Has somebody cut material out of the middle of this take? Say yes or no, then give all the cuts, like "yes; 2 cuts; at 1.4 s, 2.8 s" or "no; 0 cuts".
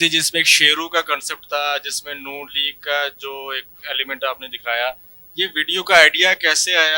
no; 0 cuts